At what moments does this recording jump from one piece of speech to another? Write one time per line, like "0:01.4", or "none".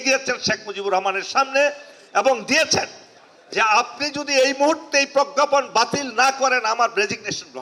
none